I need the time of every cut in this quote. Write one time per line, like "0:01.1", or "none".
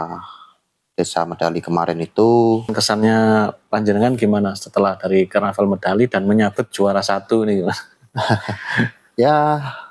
0:02.7